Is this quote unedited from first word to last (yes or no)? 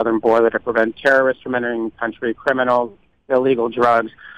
yes